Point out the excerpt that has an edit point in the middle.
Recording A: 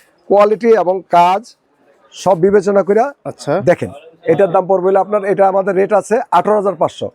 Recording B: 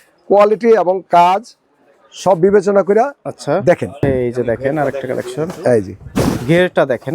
B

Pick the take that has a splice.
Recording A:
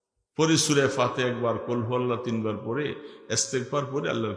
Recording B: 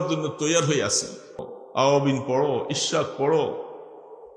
B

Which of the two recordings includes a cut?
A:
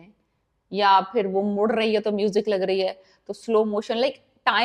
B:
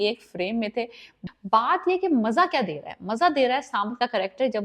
B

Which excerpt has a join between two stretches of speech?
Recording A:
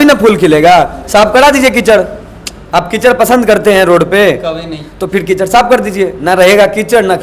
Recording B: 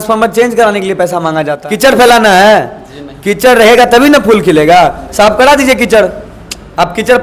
B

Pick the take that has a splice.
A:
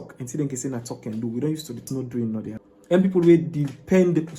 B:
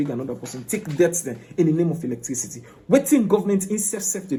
A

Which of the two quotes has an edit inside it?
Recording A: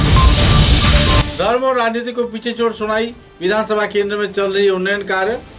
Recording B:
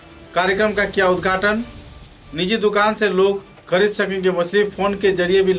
A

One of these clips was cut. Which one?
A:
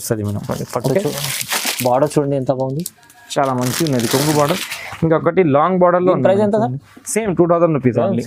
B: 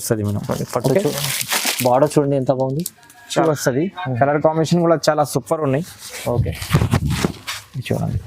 B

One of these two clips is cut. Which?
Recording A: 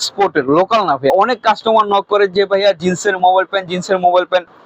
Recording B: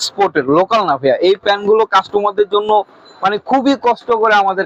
A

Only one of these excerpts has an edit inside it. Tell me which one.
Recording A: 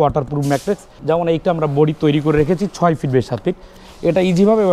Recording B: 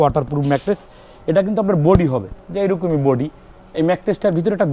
A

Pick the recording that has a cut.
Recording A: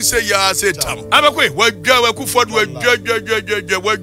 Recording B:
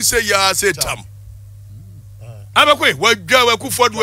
A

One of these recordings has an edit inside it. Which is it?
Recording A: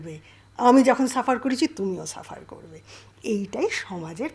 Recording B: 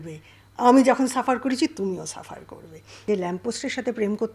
B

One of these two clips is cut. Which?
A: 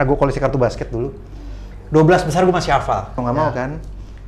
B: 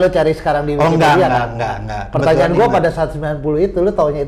A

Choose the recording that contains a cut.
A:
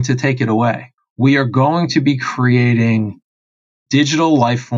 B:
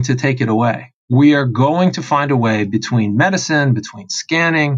A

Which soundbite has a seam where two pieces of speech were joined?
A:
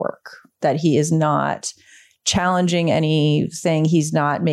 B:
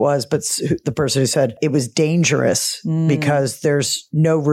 B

